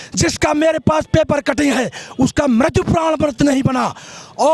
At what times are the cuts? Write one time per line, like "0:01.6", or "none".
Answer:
none